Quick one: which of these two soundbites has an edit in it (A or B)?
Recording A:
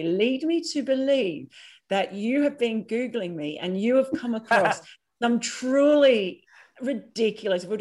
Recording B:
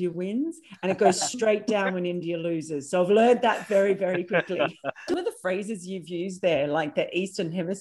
B